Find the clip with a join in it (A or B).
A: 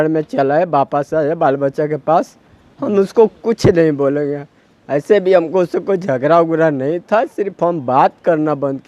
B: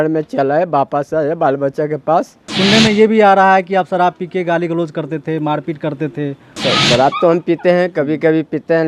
B